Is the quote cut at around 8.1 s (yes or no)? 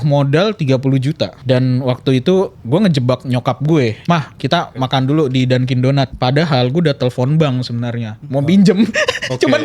no